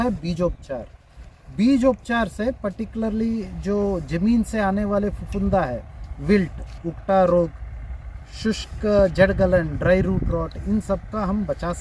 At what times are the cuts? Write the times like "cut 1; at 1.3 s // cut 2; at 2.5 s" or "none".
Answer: none